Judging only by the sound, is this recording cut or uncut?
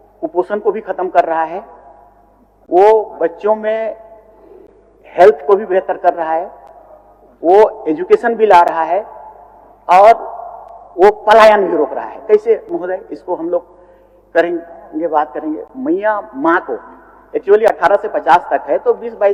uncut